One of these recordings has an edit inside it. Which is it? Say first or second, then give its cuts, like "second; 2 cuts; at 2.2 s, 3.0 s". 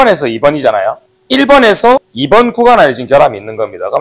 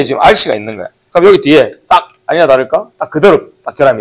first; 2 cuts; at 1.1 s, 2.1 s